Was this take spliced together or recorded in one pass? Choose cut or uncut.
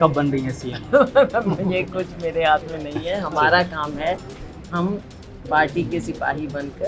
uncut